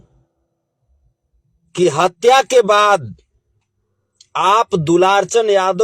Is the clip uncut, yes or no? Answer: yes